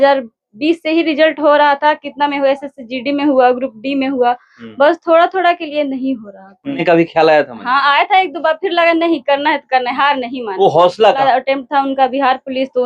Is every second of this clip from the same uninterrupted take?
no; 2 cuts; at 6.8 s, 11.2 s

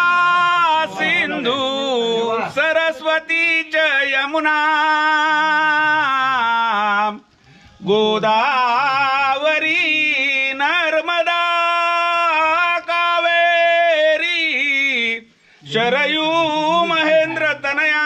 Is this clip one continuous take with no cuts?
yes; 0 cuts

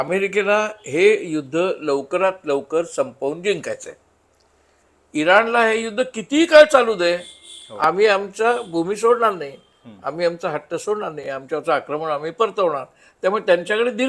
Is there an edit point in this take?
no; 0 cuts

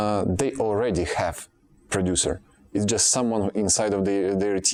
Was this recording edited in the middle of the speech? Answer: no; 0 cuts

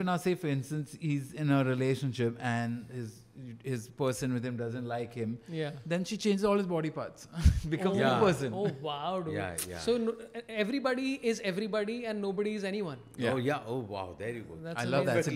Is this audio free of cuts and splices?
yes; 0 cuts

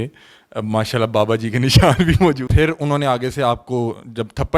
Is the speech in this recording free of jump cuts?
no; 1 cut; at 2.5 s

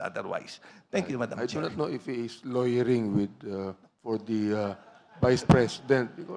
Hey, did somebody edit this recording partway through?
yes; 1 cut; at 1.3 s

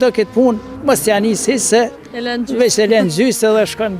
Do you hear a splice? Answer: no; 0 cuts

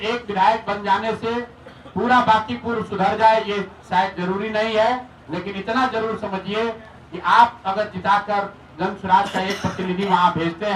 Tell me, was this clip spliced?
no; 0 cuts

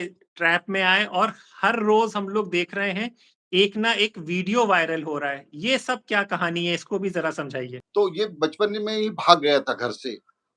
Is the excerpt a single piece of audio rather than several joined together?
no; 1 cut; at 7.8 s

